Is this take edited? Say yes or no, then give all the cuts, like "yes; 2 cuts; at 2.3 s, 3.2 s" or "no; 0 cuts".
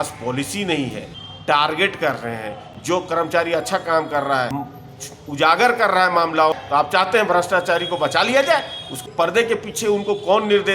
yes; 4 cuts; at 1.1 s, 4.6 s, 6.5 s, 9.0 s